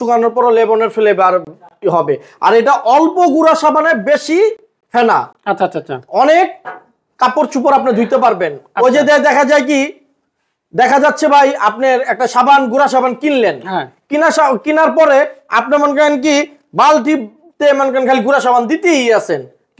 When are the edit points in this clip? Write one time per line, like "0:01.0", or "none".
none